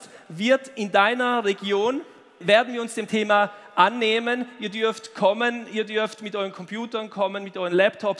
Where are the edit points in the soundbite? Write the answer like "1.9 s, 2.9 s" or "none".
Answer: 2.4 s